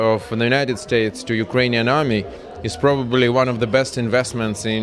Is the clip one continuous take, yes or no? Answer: yes